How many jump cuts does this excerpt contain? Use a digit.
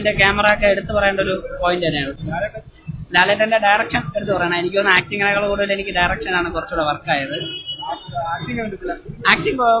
0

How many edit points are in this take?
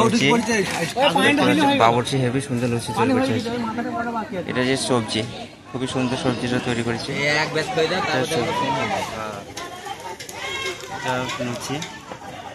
0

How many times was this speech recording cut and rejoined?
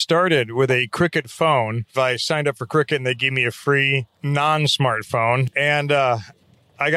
3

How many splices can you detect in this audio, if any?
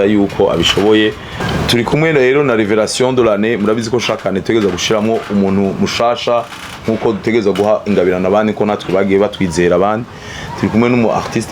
1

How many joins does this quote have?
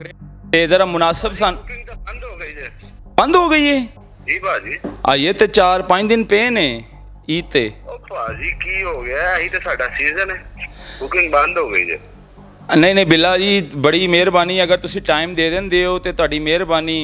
0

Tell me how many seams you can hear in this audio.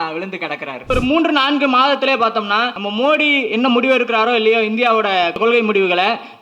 3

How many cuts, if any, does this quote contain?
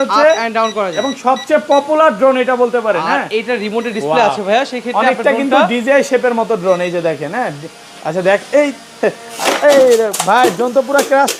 0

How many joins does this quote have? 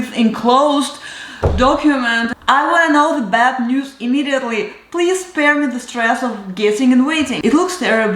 2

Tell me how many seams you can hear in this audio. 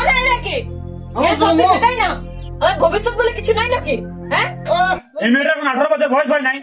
1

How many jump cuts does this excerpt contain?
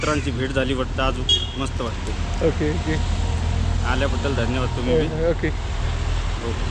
0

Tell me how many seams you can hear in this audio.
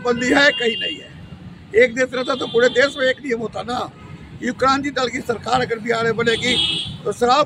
0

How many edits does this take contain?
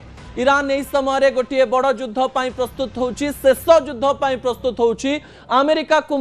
1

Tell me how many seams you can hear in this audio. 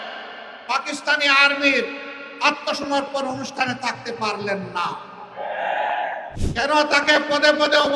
1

